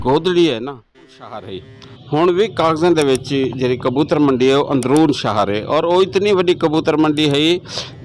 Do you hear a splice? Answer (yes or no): yes